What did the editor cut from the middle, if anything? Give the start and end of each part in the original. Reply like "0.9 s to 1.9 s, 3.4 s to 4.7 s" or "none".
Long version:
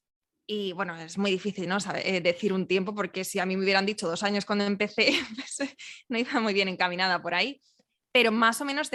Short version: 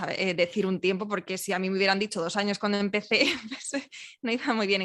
none